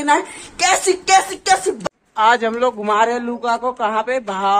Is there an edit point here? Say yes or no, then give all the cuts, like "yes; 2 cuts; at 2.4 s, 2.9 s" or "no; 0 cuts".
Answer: yes; 1 cut; at 1.8 s